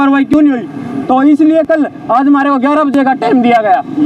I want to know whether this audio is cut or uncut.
uncut